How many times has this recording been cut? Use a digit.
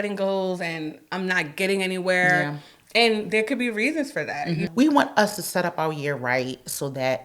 1